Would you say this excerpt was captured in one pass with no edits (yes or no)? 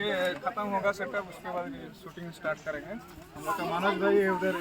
yes